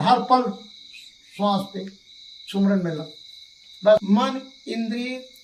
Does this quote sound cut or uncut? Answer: cut